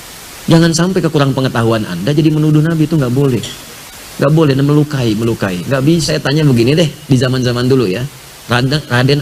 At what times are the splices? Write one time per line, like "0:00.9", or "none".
0:06.1